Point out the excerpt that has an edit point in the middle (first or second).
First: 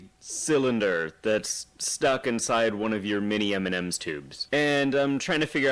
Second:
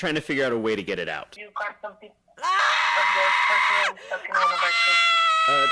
second